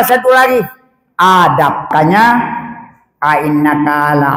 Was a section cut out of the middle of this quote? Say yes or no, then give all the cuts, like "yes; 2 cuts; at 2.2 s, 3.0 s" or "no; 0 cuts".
yes; 1 cut; at 1.9 s